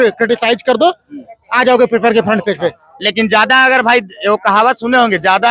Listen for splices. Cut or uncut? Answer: cut